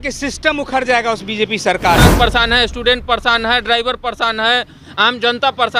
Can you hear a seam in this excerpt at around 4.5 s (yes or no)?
no